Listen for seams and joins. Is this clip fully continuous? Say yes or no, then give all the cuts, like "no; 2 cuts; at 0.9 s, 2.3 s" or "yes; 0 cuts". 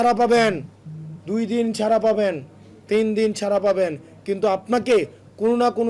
yes; 0 cuts